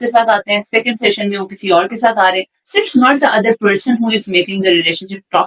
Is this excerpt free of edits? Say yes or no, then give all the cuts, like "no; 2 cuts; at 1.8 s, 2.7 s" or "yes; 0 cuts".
yes; 0 cuts